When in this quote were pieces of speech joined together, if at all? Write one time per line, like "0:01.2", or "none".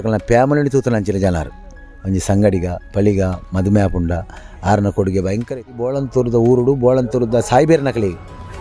0:06.0